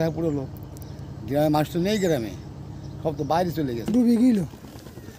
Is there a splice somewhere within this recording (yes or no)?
yes